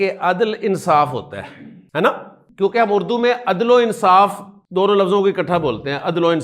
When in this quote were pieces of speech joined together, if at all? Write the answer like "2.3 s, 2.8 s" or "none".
none